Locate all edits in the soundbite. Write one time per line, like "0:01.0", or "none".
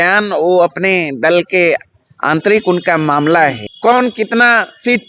0:03.7